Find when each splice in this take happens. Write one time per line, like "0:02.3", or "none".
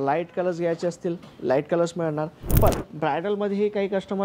0:02.5